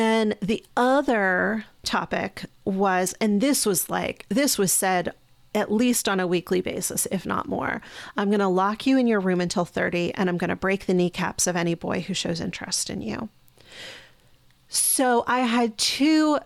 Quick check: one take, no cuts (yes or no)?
no